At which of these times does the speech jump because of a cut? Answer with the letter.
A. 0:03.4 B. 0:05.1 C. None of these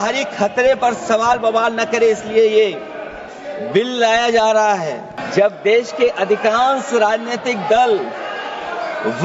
B